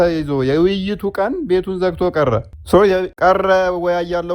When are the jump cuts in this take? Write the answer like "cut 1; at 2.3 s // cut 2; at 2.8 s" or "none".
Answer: cut 1; at 2.5 s // cut 2; at 3.1 s

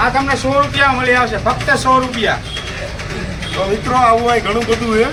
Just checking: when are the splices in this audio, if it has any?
none

